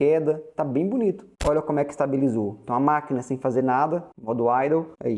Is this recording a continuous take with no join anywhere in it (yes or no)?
no